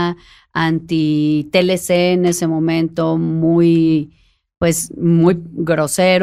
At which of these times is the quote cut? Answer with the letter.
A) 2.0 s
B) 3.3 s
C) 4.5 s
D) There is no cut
D